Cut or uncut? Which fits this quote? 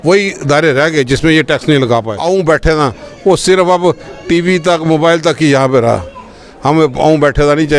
cut